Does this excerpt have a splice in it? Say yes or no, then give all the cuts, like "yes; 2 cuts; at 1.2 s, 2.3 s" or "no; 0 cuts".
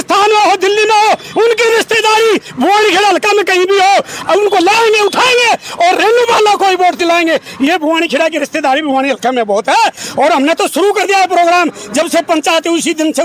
no; 0 cuts